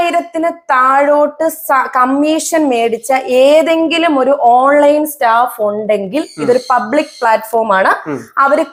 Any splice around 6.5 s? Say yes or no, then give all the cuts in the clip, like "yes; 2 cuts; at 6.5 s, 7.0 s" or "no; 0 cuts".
no; 0 cuts